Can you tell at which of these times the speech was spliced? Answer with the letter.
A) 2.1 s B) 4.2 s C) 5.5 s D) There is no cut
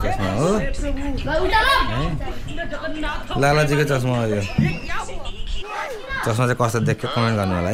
C